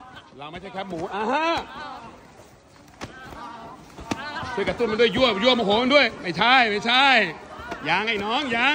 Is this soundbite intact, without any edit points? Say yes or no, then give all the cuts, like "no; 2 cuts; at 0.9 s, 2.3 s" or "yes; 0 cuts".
yes; 0 cuts